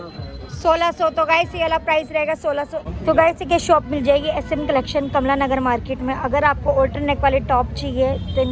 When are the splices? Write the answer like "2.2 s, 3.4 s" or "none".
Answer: 2.8 s